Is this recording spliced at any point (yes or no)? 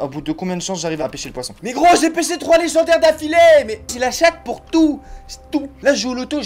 yes